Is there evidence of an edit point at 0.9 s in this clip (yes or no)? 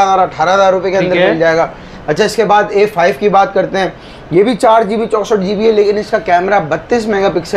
no